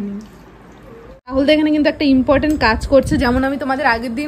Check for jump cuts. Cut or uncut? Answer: cut